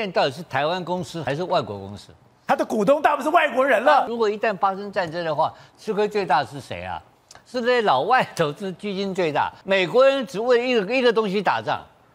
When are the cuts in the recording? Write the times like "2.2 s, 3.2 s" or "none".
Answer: 1.2 s, 4.1 s, 9.6 s